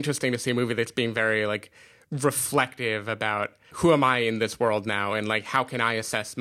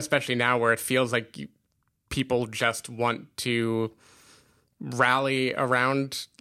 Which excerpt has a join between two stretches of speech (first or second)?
first